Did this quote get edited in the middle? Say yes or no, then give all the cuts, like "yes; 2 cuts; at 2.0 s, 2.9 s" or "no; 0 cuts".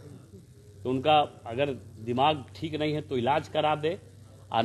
no; 0 cuts